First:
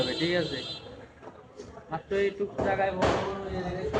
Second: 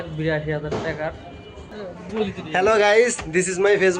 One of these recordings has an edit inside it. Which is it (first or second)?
second